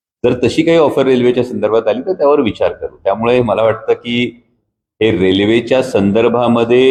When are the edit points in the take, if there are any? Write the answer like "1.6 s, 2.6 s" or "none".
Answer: none